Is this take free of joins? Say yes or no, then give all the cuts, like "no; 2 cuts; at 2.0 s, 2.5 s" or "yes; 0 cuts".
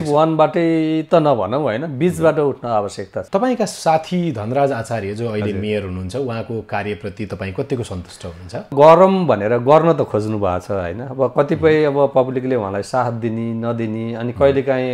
no; 2 cuts; at 3.1 s, 8.7 s